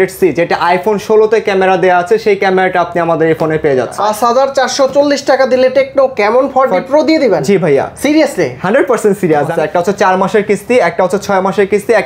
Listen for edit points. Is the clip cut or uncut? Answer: cut